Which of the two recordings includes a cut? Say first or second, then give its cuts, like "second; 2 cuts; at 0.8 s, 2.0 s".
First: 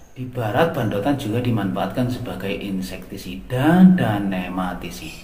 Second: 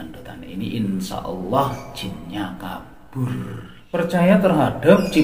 second; 1 cut; at 3.7 s